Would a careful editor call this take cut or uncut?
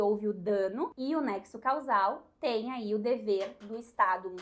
cut